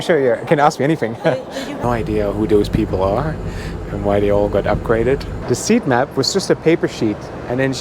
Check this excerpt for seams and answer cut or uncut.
cut